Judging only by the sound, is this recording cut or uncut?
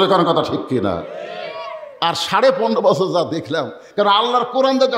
cut